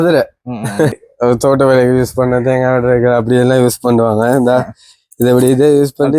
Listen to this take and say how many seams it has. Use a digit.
1